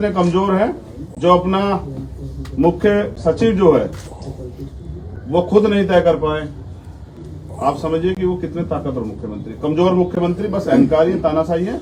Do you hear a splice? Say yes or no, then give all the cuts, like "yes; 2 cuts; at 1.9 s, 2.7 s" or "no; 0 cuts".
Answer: no; 0 cuts